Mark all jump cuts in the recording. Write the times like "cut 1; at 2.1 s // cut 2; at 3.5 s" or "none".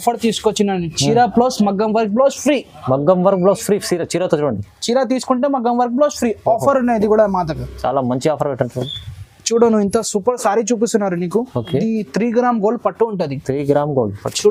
none